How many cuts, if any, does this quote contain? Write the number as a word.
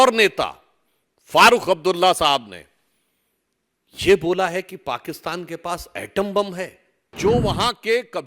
one